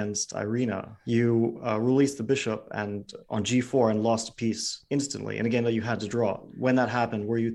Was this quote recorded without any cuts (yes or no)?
no